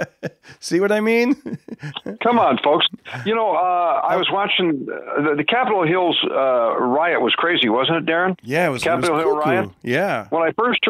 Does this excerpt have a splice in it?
no; 0 cuts

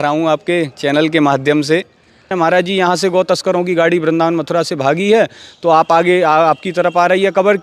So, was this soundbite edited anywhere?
yes; 1 cut; at 2.3 s

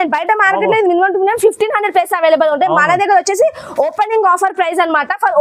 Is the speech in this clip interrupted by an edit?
no; 0 cuts

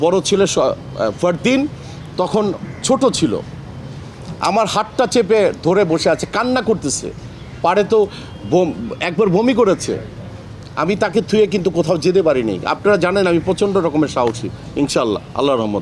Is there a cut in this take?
no; 0 cuts

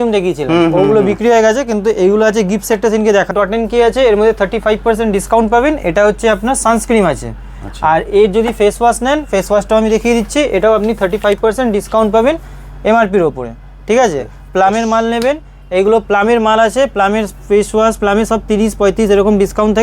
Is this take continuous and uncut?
no; 1 cut; at 3.3 s

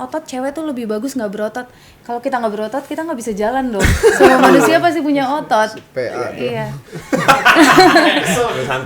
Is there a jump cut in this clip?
no; 0 cuts

